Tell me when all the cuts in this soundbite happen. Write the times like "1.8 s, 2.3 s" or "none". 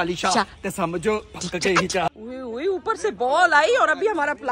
2.1 s